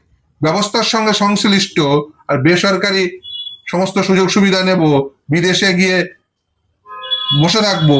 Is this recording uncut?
yes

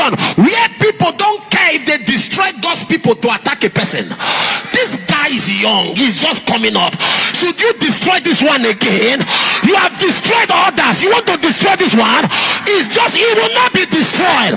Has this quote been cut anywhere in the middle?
no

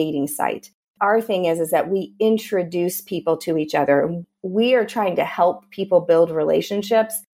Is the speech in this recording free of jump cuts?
no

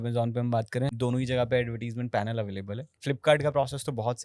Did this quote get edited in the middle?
yes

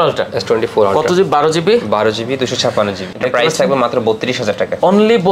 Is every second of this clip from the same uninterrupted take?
no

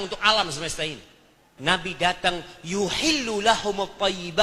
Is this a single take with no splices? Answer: no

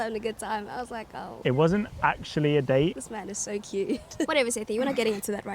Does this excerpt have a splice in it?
yes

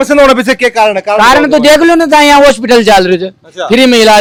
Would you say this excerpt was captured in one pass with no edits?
yes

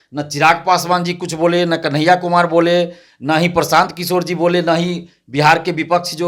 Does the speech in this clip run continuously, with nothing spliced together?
yes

